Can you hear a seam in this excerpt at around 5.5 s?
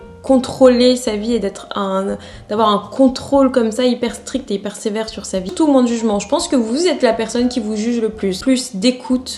yes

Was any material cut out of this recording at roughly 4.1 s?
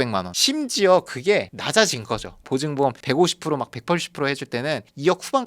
no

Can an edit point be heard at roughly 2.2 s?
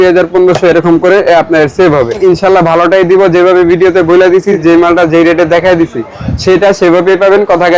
yes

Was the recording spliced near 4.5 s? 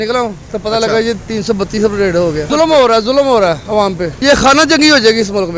no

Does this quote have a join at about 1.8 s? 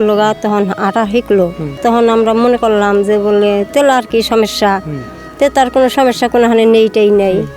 yes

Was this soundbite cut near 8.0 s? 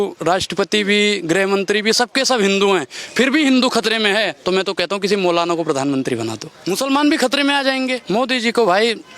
yes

